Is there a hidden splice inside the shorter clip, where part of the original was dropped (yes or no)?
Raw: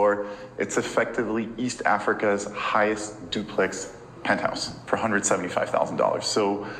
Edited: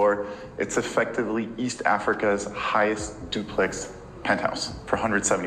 no